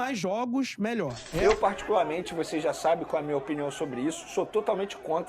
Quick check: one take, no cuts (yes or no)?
no